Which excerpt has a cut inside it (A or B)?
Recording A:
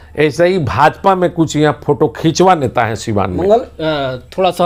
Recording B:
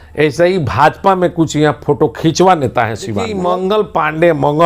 B